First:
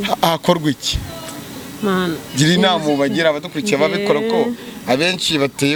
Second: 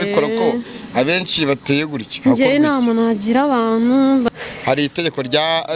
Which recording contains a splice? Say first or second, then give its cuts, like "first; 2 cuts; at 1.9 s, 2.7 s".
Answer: second; 1 cut; at 4.3 s